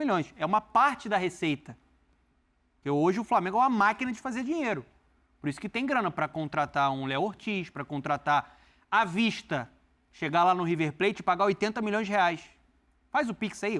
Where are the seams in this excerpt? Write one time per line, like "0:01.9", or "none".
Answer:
none